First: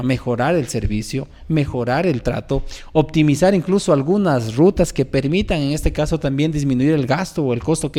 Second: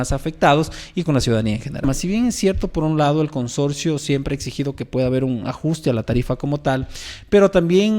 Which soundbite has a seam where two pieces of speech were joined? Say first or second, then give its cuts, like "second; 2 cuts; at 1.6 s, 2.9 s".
second; 1 cut; at 1.8 s